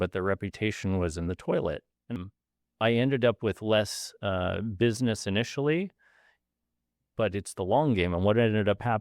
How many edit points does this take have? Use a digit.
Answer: 1